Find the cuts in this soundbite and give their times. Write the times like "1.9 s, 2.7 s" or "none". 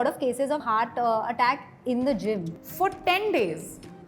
2.5 s